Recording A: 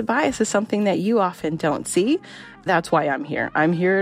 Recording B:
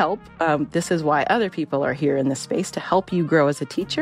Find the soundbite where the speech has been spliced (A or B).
A